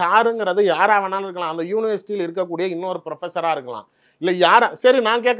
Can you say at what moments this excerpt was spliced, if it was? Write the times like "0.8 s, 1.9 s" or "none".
none